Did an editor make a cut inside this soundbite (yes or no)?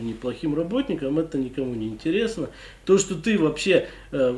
no